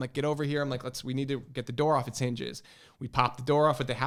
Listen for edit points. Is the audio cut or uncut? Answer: uncut